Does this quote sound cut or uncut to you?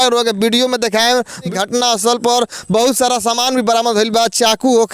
cut